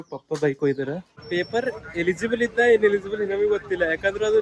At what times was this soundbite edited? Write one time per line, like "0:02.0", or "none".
0:01.2